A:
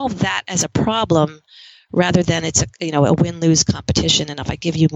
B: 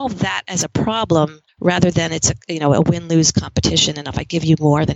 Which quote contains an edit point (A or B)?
B